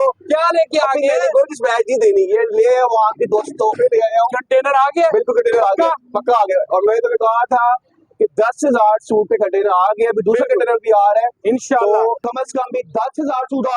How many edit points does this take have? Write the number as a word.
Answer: one